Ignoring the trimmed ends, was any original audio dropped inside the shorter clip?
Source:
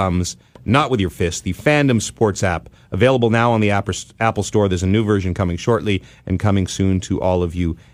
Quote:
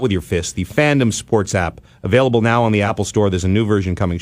yes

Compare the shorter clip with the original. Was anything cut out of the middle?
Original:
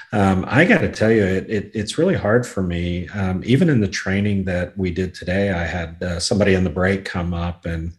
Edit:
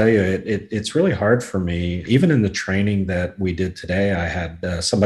yes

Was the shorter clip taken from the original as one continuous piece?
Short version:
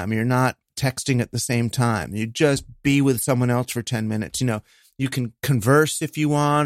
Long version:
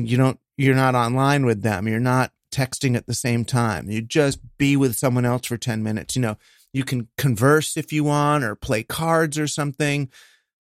yes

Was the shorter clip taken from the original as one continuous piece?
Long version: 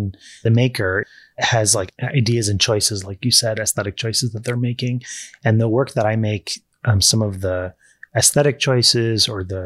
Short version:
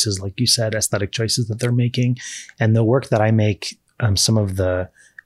yes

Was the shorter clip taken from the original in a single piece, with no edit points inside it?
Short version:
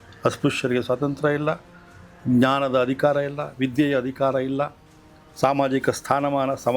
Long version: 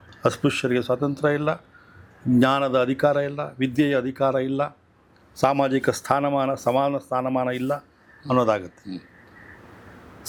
yes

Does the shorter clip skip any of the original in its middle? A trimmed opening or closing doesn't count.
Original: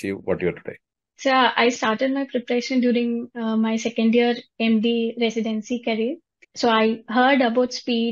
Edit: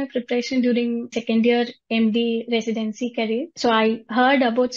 yes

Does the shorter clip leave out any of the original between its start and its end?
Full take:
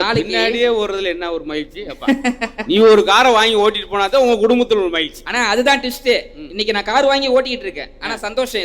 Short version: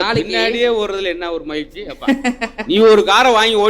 no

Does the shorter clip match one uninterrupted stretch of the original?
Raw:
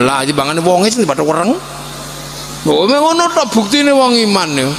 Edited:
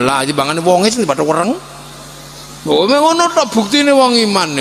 yes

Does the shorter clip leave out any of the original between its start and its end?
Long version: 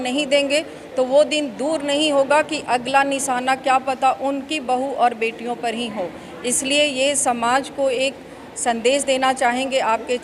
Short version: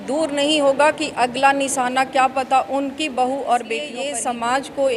yes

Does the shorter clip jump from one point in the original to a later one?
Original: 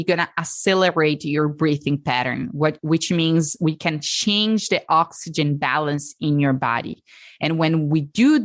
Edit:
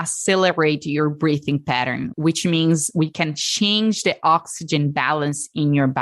yes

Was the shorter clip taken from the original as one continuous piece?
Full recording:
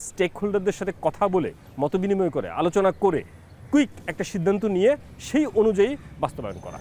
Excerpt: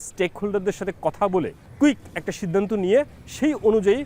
no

